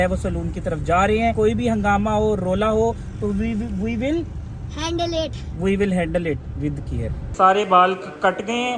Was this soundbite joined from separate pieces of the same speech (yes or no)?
yes